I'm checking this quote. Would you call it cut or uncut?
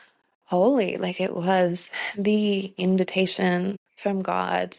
cut